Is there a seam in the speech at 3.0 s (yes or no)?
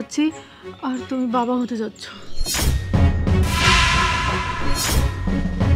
no